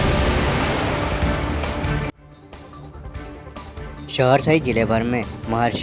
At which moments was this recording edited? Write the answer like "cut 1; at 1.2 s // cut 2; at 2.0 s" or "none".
cut 1; at 2.3 s // cut 2; at 4.2 s